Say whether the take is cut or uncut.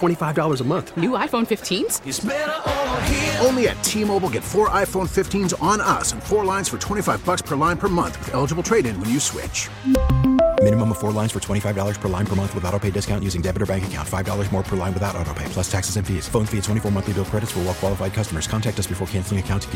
uncut